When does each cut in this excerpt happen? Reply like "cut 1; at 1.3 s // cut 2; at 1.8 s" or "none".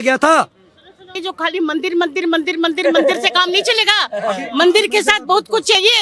cut 1; at 1.1 s